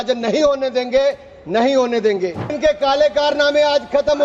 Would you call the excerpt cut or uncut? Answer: cut